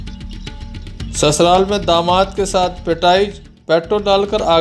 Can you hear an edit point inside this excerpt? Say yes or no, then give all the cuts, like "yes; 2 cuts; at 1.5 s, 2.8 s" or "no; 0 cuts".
yes; 1 cut; at 1.2 s